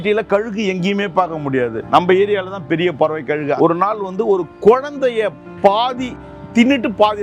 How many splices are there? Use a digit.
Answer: 2